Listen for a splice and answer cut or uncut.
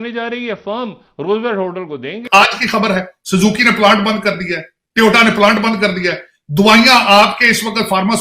cut